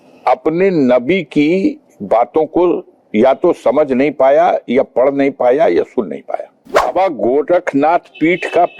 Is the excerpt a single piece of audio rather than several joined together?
no; 1 cut; at 6.9 s

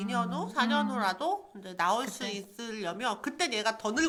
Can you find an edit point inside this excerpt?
no; 0 cuts

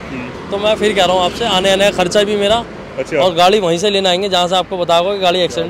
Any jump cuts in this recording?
no; 0 cuts

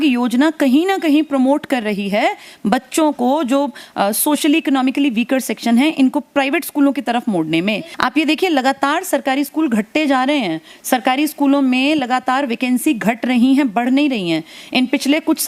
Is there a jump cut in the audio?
yes; 1 cut; at 7.9 s

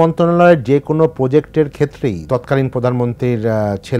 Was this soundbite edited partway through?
yes; 1 cut; at 2.3 s

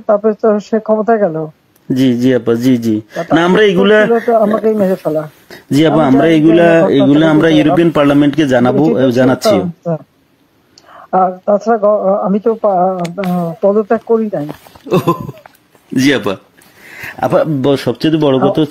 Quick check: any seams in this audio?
no; 0 cuts

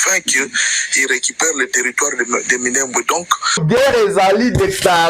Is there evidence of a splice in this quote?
yes; 1 cut; at 3.6 s

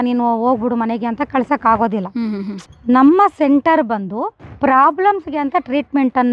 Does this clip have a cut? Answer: yes; 1 cut; at 2.6 s

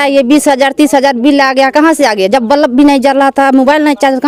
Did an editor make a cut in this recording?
no; 0 cuts

